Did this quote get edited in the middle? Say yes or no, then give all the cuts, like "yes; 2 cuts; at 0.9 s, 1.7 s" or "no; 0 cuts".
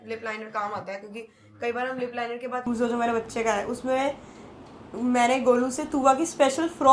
yes; 1 cut; at 2.6 s